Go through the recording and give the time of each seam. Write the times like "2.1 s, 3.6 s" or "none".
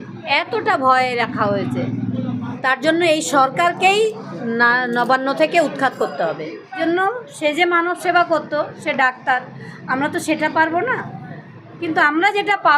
2.5 s, 6.7 s